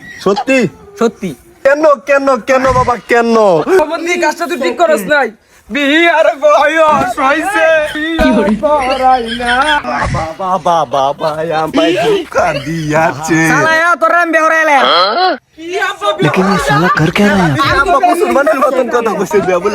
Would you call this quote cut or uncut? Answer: cut